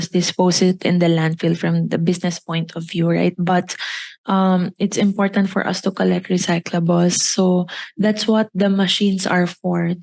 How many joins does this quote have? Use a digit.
0